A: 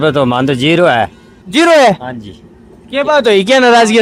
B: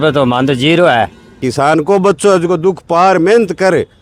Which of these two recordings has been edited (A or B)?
B